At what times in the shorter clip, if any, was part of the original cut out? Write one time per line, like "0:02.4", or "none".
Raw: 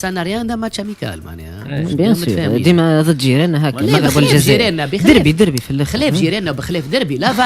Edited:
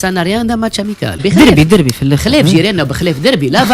0:01.2